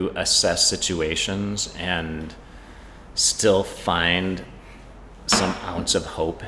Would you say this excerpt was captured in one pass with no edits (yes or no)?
yes